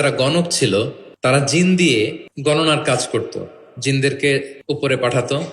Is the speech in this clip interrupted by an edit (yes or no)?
yes